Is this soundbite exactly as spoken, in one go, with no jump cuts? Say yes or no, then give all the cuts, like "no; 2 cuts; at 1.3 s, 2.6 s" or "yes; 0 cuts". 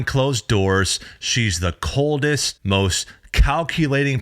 no; 1 cut; at 2.5 s